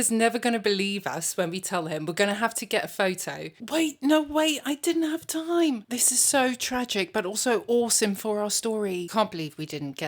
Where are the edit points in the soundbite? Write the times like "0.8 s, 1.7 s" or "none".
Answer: none